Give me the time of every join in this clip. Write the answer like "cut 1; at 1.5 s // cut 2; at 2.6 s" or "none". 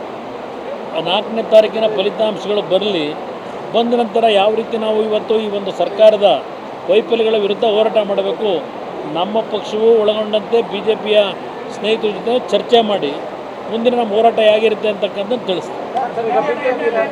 none